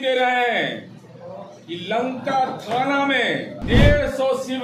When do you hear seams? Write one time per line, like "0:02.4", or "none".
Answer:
0:03.5